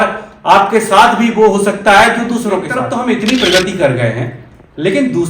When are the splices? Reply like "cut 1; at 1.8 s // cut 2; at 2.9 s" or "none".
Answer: cut 1; at 2.8 s

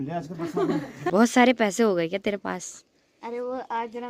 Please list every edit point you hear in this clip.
cut 1; at 0.9 s

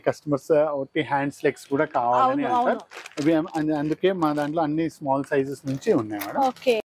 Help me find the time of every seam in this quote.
none

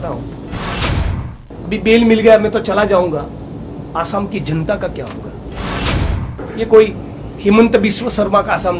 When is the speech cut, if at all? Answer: cut 1; at 1.0 s // cut 2; at 6.1 s

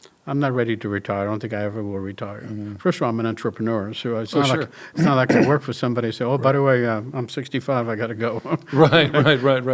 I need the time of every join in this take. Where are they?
none

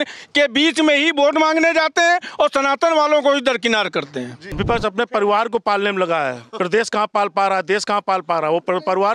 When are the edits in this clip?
cut 1; at 4.5 s

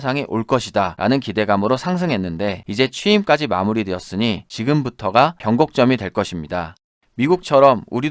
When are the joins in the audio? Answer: cut 1; at 6.8 s

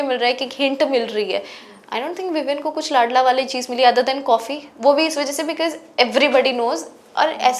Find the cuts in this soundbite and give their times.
none

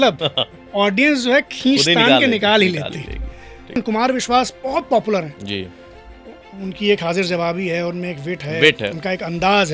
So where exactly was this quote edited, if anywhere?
cut 1; at 3.8 s

